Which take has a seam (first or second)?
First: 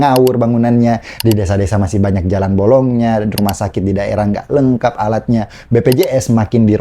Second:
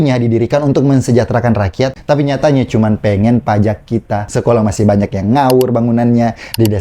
second